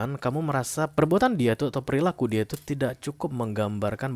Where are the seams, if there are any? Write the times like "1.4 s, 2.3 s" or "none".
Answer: 0.9 s